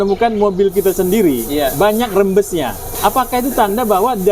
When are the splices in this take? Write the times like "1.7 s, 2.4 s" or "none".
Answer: 2.9 s